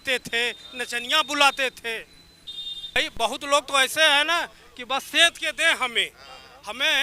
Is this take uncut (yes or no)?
no